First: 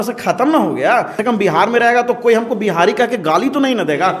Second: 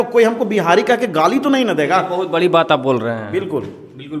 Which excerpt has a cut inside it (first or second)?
first